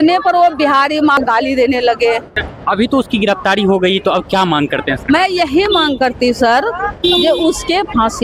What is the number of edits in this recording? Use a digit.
2